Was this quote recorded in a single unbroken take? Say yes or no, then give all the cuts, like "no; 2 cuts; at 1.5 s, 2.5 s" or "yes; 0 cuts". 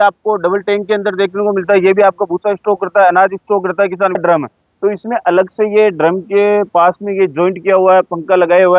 no; 1 cut; at 4.2 s